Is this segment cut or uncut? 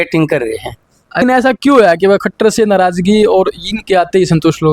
cut